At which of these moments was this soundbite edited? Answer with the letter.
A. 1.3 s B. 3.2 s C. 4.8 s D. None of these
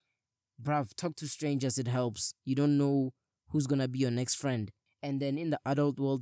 C